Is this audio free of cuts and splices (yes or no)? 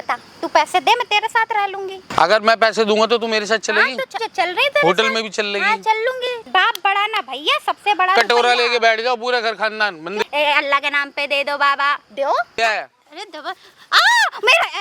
no